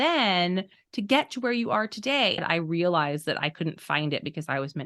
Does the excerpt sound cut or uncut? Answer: cut